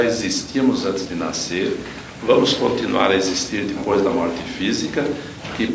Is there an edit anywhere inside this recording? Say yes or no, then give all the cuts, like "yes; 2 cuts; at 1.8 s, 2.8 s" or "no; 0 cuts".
no; 0 cuts